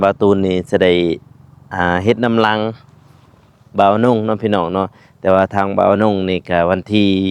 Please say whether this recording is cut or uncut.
uncut